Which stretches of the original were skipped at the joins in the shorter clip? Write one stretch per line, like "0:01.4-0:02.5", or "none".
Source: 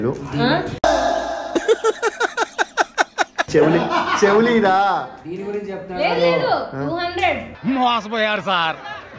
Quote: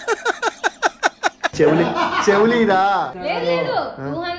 0:05.1-0:05.9